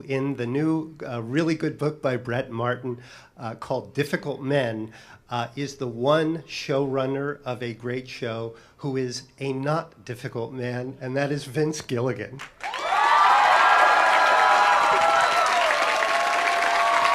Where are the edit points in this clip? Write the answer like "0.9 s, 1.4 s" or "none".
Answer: 6.9 s

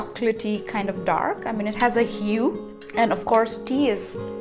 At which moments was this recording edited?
2.7 s

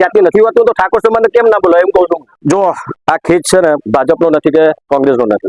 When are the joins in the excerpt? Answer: 2.3 s

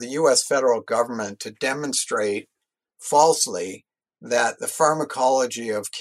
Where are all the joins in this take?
none

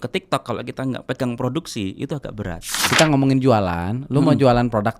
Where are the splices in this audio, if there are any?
2.8 s

